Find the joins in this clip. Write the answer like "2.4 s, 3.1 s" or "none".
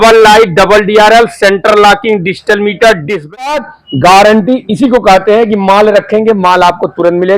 3.2 s